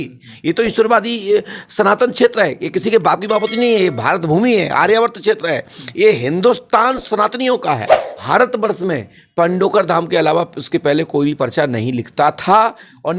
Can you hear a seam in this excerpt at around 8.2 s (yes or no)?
yes